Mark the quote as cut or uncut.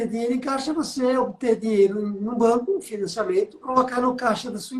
cut